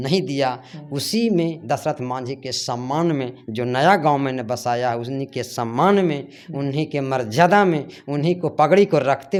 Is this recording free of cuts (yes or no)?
yes